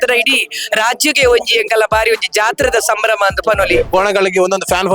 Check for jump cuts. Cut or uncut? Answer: cut